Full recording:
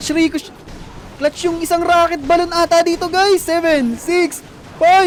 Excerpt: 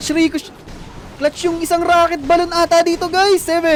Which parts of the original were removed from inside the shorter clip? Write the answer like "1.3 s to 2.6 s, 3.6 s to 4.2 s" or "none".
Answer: none